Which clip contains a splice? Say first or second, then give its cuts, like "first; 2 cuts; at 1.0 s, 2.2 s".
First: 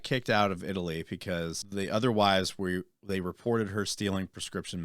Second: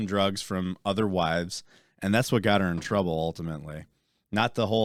first; 1 cut; at 1.6 s